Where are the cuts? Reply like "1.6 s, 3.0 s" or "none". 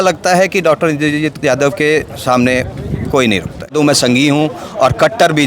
3.7 s

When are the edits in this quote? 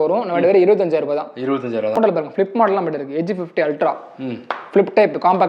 2.0 s

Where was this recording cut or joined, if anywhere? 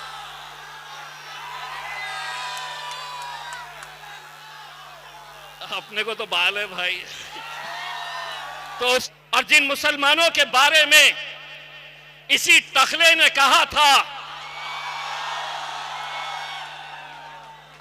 9.1 s

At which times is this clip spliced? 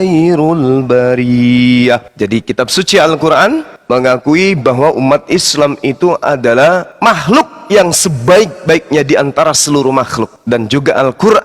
2.1 s, 3.7 s, 6.9 s, 10.4 s

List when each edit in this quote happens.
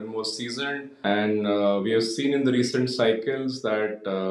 0.9 s

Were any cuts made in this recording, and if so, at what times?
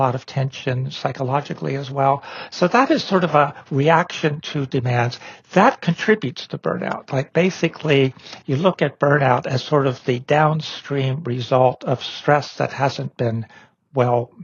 none

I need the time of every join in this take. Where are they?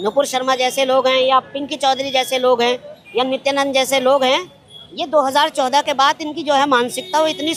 none

